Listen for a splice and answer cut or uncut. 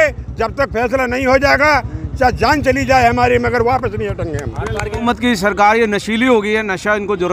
cut